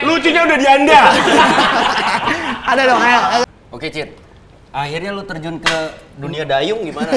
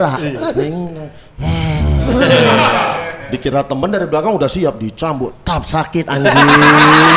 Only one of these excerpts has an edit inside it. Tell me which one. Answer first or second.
first